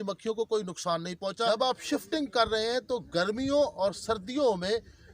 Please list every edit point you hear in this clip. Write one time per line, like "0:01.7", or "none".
0:01.3